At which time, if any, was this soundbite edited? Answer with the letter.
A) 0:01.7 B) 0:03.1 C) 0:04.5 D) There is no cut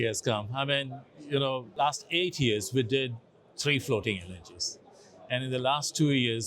A